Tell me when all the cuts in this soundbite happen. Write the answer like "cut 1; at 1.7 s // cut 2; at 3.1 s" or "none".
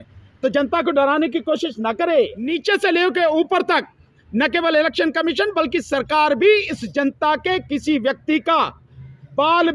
cut 1; at 2.6 s